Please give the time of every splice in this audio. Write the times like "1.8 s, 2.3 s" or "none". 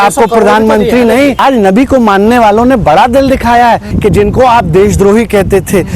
1.4 s, 3.9 s